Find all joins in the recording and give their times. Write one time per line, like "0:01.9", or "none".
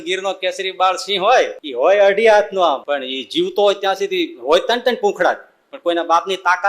0:01.6
0:02.8